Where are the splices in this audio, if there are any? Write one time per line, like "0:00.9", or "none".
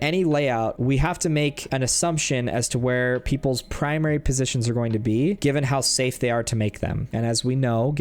0:00.8
0:01.6
0:05.4
0:07.0